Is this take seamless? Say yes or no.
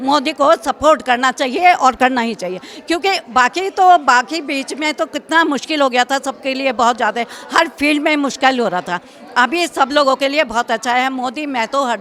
yes